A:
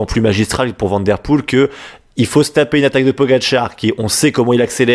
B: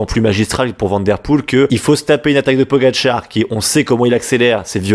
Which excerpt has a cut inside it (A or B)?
B